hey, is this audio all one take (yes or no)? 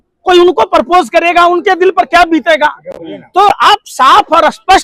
yes